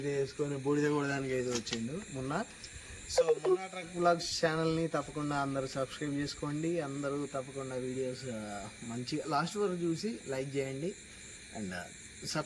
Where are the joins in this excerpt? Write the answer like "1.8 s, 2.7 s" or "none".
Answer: none